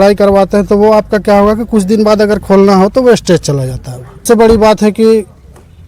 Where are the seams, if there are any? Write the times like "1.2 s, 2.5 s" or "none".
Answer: 4.2 s